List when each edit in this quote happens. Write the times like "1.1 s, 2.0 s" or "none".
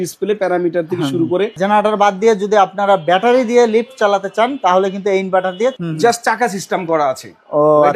1.6 s, 5.7 s